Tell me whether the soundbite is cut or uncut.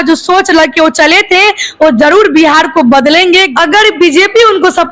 cut